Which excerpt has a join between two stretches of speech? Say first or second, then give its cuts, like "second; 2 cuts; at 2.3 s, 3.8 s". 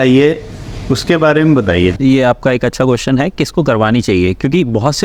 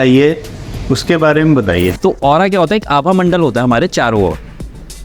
second; 1 cut; at 2.0 s